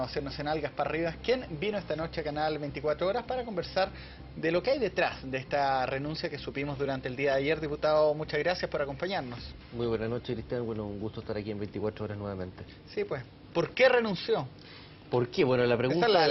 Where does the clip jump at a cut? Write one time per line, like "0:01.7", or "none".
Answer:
0:11.7